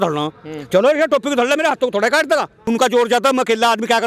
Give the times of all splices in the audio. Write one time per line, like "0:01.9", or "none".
0:02.6